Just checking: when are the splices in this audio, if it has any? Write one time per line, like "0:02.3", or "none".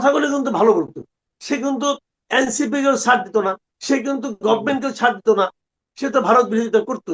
0:01.3
0:03.7